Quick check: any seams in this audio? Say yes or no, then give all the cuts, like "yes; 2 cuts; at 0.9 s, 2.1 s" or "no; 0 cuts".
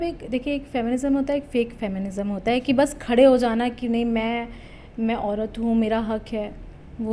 no; 0 cuts